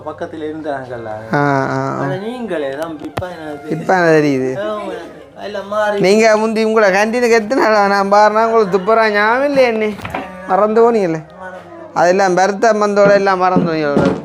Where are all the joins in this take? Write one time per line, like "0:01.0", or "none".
none

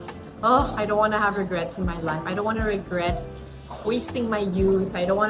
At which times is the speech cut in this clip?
none

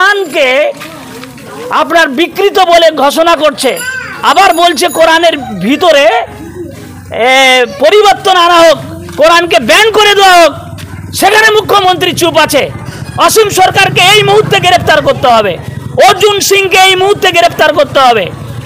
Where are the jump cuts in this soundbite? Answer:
none

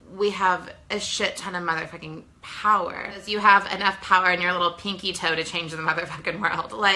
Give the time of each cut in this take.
0:03.2

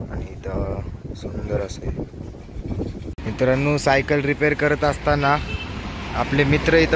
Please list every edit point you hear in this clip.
0:03.2

